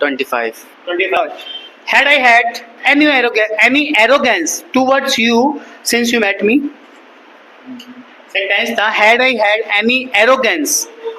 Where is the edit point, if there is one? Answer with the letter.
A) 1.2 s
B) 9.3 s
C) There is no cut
A